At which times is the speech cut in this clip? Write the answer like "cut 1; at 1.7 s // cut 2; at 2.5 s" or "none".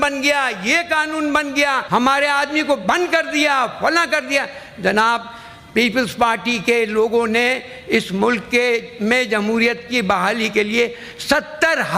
cut 1; at 1.8 s